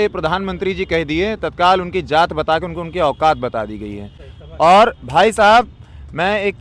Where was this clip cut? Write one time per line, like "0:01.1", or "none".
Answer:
none

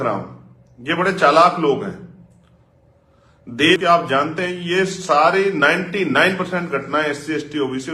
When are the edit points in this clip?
0:03.8

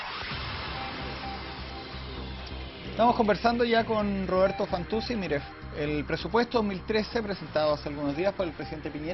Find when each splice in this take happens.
none

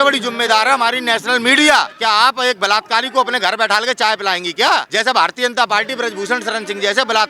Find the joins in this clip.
0:01.9
0:04.9

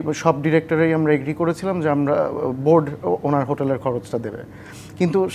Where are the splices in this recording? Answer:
none

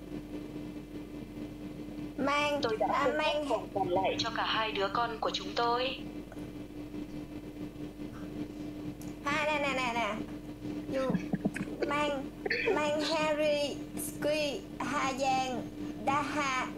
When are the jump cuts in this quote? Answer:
none

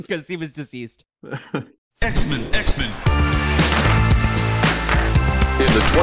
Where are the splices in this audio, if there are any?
0:01.8

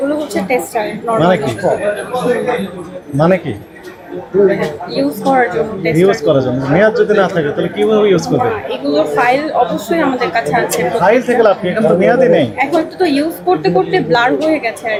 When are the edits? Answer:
none

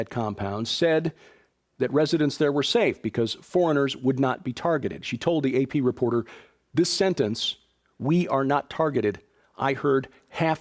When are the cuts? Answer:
0:06.1

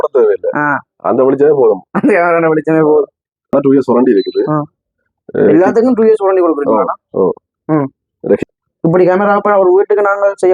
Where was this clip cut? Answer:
0:03.5
0:08.4

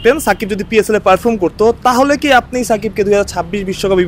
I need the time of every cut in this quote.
none

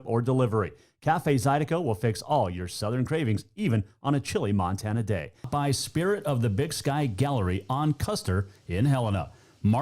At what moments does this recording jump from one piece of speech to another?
0:05.5

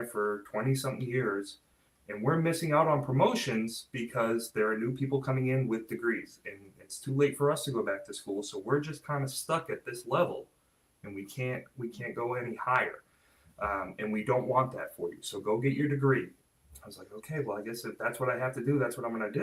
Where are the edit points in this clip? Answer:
0:16.4

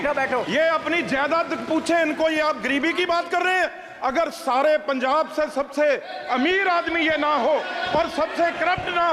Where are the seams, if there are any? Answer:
none

